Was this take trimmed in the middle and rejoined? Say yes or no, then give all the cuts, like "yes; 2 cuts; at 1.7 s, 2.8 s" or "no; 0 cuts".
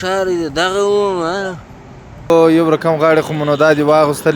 yes; 1 cut; at 2.3 s